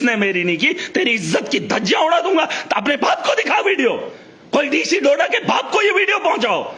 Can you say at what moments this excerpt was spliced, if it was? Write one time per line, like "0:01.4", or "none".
none